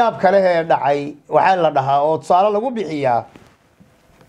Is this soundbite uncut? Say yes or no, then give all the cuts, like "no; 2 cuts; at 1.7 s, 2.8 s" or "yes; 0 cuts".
yes; 0 cuts